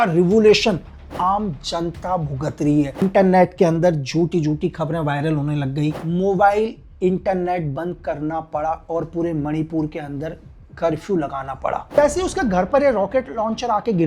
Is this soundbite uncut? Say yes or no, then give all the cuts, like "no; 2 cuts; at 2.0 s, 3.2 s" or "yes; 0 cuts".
no; 3 cuts; at 3.0 s, 6.0 s, 11.8 s